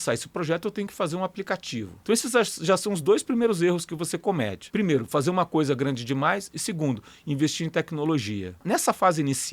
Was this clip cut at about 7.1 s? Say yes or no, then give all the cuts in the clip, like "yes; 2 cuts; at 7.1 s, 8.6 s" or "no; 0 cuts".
no; 3 cuts; at 1.9 s, 4.6 s, 8.6 s